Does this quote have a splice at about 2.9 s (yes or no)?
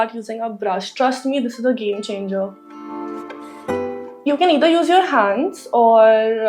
no